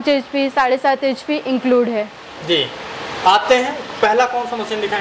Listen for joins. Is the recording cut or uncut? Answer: uncut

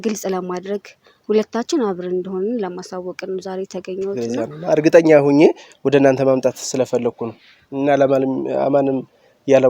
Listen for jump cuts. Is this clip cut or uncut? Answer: cut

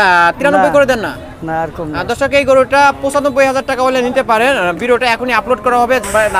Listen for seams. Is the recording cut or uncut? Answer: uncut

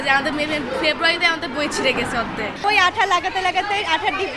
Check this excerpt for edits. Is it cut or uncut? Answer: cut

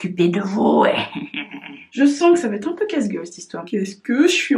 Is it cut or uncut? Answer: cut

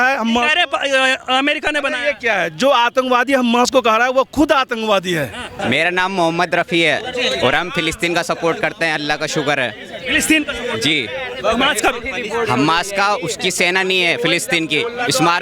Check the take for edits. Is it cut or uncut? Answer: cut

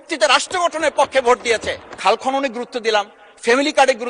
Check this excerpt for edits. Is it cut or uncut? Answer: cut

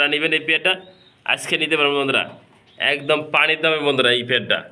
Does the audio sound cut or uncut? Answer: uncut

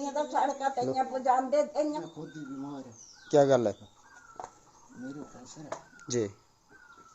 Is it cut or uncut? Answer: cut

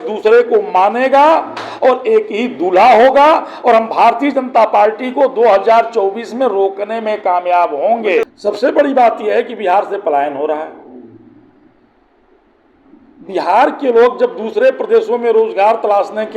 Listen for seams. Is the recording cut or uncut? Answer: cut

